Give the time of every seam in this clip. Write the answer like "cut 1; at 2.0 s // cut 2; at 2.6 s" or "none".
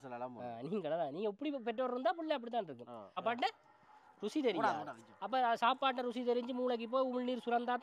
cut 1; at 3.0 s